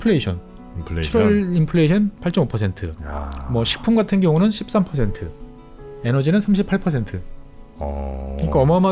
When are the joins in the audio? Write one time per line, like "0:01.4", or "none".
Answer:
none